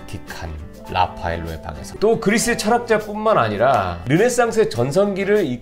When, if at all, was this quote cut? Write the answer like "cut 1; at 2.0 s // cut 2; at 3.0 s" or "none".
cut 1; at 1.9 s